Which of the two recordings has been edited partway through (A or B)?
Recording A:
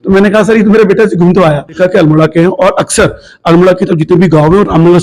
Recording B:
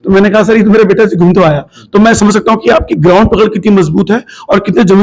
A